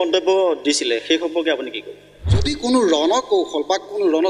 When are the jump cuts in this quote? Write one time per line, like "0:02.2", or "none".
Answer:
0:02.5